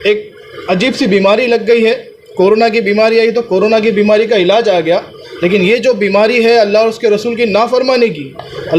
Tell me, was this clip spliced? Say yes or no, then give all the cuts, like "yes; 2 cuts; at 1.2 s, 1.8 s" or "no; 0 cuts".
no; 0 cuts